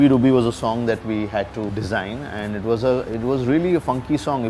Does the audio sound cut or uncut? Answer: uncut